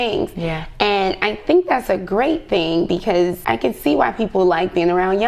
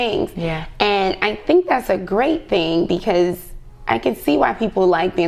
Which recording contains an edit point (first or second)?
first